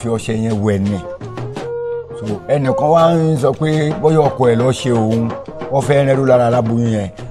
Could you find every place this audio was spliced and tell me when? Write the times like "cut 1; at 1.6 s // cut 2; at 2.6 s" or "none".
cut 1; at 0.9 s // cut 2; at 2.2 s